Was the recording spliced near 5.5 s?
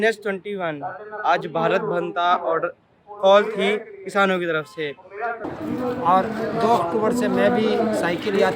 yes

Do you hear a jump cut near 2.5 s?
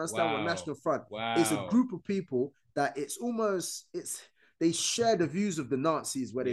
no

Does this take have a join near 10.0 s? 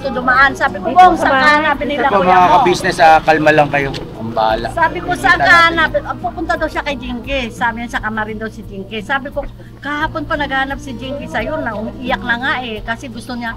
no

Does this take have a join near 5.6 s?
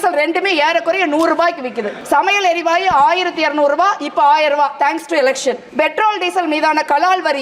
yes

